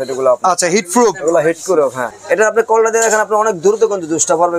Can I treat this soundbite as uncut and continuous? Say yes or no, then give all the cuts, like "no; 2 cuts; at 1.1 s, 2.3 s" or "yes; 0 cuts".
no; 1 cut; at 2.1 s